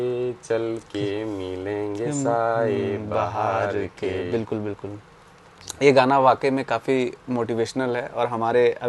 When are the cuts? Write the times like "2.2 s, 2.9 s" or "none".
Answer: none